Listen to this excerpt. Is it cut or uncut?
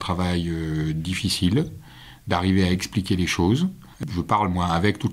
cut